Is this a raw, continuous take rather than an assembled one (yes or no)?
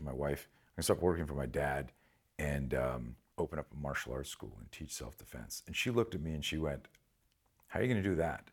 no